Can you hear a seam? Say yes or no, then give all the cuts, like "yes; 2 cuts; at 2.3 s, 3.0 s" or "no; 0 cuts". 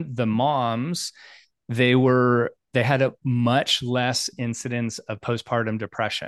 no; 0 cuts